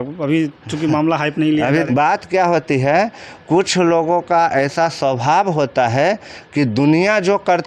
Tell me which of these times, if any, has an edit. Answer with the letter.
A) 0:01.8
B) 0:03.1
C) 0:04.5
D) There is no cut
A